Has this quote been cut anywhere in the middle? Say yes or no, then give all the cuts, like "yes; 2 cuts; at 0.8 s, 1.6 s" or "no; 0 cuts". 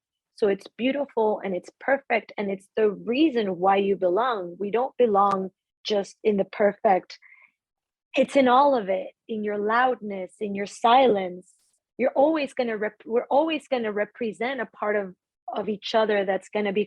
yes; 1 cut; at 7.4 s